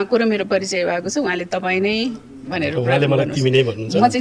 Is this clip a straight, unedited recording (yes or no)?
yes